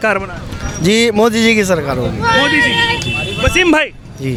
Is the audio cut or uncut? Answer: uncut